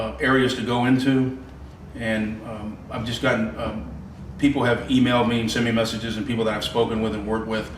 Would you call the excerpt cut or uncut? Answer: cut